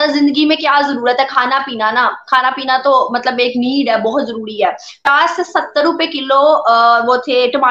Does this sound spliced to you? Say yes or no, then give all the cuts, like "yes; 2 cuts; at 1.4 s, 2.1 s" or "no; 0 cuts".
yes; 1 cut; at 5.0 s